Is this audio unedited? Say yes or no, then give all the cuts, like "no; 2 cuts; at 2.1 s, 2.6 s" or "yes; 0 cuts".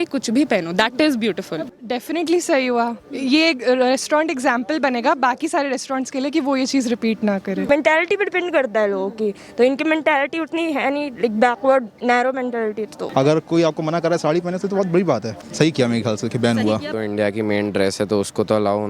no; 5 cuts; at 1.7 s, 7.6 s, 12.9 s, 15.4 s, 16.9 s